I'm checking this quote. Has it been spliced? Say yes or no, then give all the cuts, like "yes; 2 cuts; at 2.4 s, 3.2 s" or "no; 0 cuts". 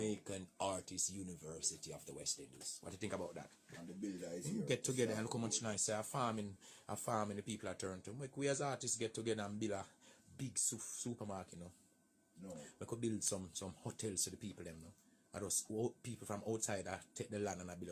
no; 0 cuts